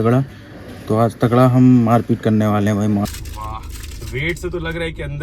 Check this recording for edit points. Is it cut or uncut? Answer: cut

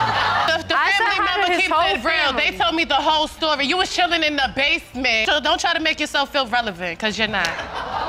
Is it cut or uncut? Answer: uncut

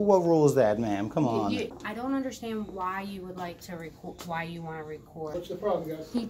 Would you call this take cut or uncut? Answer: cut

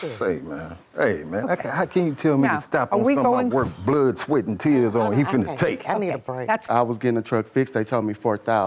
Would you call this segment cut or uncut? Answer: cut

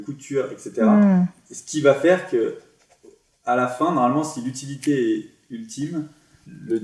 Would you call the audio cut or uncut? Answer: uncut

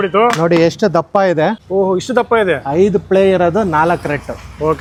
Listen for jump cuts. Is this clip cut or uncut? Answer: uncut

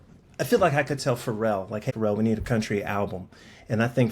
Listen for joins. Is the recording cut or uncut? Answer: cut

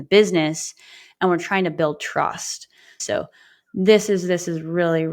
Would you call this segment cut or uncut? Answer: cut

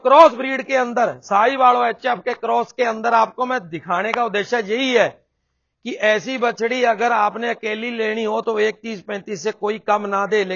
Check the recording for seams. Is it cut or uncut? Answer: uncut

